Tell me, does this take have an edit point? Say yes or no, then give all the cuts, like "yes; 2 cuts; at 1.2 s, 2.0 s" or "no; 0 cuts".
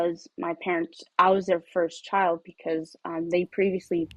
no; 0 cuts